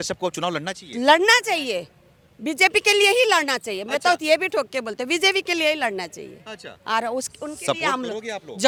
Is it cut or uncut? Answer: uncut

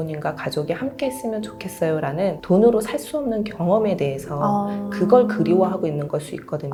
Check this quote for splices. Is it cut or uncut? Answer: uncut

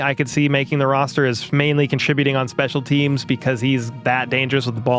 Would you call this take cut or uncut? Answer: uncut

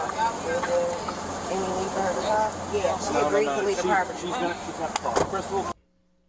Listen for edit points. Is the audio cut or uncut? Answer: uncut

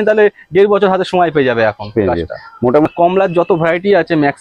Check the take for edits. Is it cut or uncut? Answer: cut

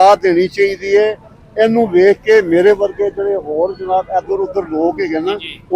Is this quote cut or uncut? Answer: uncut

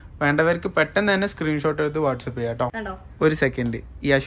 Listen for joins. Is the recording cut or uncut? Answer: cut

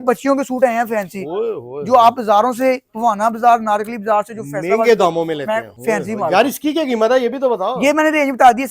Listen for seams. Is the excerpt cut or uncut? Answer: cut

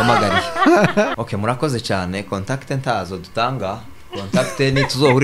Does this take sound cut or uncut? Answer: cut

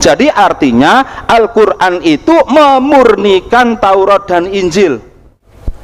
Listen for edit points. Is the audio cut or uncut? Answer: uncut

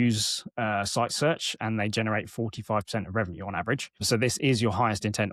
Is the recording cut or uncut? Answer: uncut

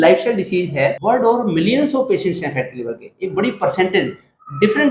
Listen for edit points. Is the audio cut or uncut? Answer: cut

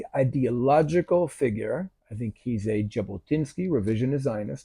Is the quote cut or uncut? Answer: cut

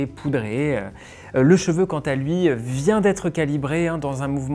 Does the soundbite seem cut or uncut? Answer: uncut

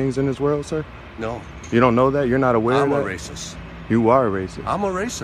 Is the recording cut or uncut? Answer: uncut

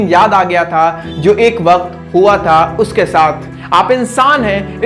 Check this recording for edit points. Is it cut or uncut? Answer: cut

